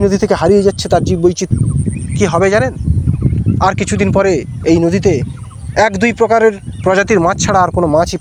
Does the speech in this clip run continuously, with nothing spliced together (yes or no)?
no